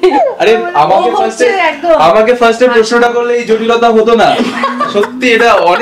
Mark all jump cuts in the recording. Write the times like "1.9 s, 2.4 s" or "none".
none